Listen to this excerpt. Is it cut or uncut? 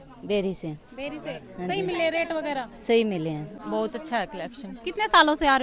cut